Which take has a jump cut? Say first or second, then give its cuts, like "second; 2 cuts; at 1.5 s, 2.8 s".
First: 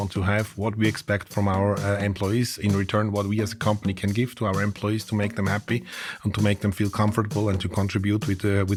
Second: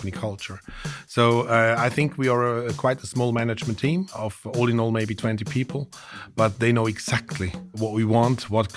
second; 2 cuts; at 4.2 s, 7.8 s